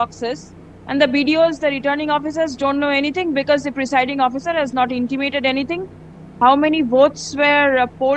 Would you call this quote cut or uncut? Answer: cut